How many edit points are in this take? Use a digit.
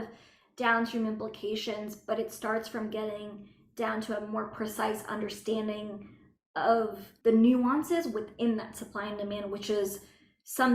1